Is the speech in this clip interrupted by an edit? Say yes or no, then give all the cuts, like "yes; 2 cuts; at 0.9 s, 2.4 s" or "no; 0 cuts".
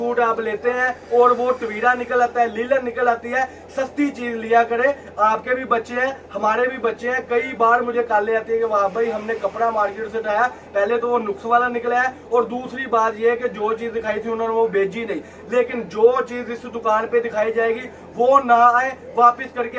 no; 0 cuts